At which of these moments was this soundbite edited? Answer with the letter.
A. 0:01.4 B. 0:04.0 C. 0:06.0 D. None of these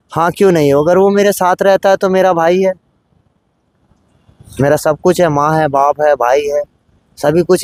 D